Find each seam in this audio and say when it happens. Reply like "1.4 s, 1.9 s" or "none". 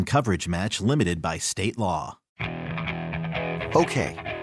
2.3 s

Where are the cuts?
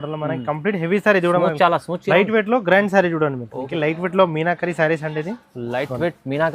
3.7 s

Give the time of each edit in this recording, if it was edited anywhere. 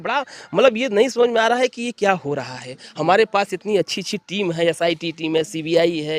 none

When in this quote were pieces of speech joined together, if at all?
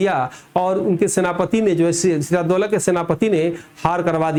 none

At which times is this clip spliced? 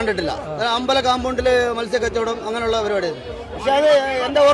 none

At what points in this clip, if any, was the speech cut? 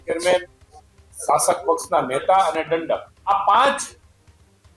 3.1 s

